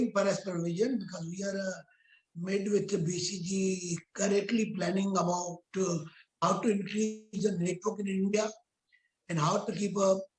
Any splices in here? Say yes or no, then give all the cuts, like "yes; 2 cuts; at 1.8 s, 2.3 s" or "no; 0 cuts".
no; 0 cuts